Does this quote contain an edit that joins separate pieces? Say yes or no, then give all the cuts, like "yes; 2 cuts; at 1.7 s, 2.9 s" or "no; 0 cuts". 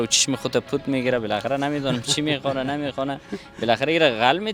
no; 0 cuts